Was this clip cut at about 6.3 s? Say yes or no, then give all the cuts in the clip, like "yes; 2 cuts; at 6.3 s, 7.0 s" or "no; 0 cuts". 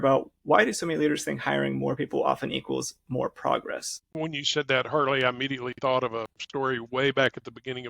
no; 1 cut; at 4.0 s